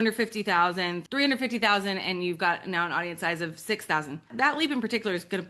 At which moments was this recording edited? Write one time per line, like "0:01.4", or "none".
0:01.0
0:04.3